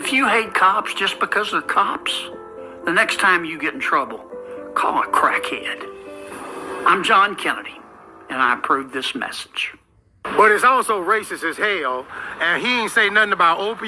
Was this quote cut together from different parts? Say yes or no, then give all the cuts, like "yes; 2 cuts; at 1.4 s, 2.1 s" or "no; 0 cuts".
no; 0 cuts